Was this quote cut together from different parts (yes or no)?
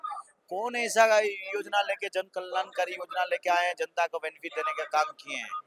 no